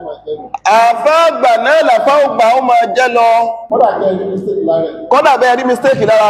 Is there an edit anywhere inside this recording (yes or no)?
yes